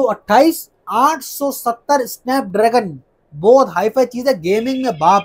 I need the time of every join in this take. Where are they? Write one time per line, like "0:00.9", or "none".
none